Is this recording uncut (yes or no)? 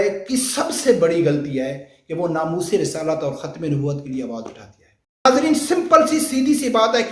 no